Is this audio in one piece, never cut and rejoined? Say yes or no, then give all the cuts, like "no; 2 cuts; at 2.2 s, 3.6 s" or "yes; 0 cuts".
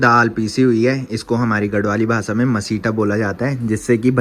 yes; 0 cuts